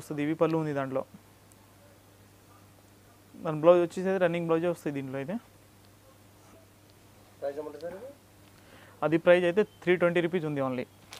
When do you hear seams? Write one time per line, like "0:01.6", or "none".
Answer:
none